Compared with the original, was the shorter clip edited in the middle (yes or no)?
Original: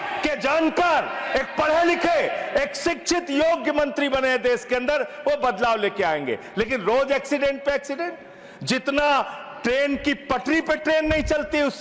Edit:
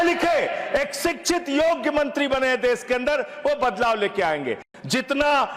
yes